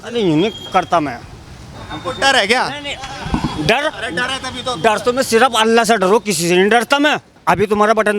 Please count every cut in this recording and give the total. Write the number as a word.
one